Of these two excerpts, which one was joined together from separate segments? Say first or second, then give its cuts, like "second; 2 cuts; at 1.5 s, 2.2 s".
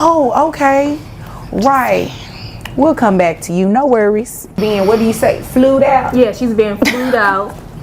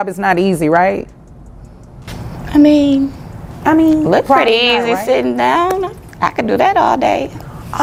first; 1 cut; at 4.6 s